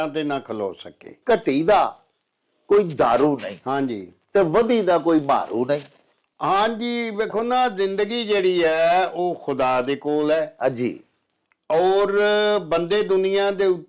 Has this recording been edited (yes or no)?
yes